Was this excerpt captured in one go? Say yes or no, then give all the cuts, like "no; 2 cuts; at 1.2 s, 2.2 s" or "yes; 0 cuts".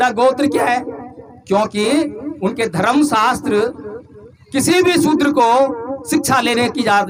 yes; 0 cuts